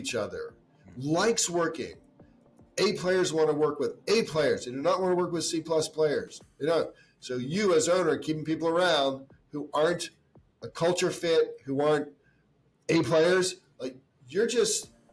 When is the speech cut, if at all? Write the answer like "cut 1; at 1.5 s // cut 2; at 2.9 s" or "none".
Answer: none